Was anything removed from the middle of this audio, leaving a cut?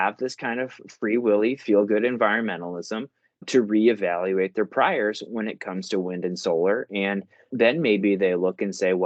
no; 0 cuts

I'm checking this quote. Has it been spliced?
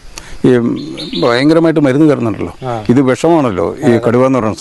no; 0 cuts

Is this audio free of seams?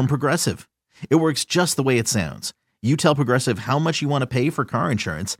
yes; 0 cuts

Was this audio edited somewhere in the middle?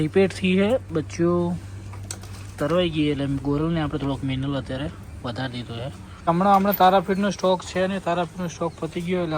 yes; 1 cut; at 6.1 s

